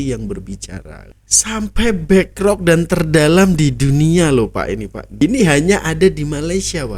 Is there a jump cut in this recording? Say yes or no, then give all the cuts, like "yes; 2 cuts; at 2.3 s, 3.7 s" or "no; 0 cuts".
yes; 2 cuts; at 1.0 s, 5.0 s